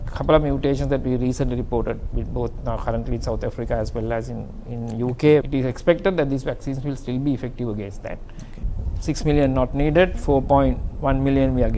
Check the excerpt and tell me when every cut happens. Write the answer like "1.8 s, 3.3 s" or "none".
5.4 s, 8.6 s